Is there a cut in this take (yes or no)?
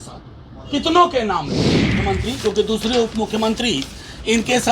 yes